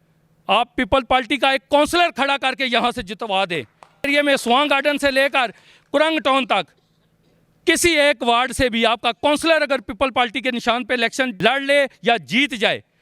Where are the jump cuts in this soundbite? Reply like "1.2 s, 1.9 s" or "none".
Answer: 4.1 s, 11.3 s